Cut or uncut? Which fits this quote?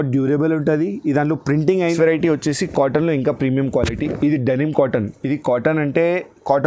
cut